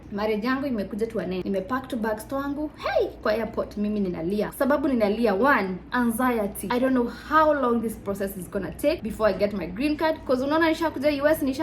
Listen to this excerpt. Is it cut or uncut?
cut